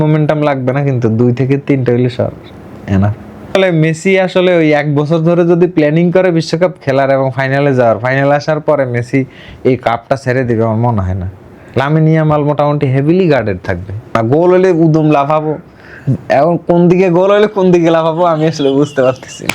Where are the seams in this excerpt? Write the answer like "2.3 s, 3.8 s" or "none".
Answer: 3.6 s, 14.1 s